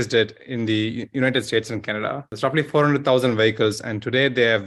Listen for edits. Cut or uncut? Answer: cut